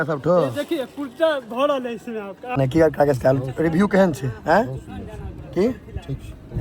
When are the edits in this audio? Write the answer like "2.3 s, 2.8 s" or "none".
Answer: 2.4 s